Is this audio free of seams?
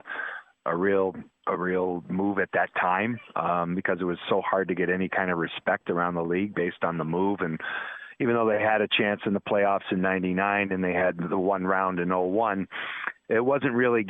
yes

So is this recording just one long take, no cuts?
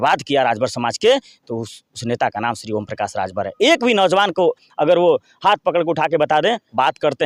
yes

